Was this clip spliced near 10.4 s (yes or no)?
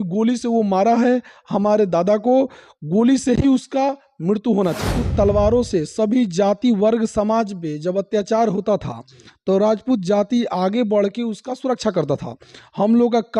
no